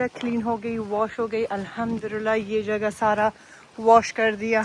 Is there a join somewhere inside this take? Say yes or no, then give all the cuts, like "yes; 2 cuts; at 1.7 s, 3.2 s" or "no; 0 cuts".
no; 0 cuts